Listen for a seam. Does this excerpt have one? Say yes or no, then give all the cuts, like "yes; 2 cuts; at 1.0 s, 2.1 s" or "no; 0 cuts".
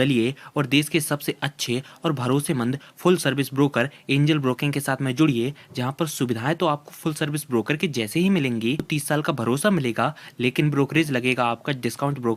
no; 0 cuts